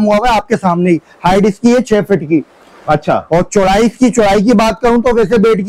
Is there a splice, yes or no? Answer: no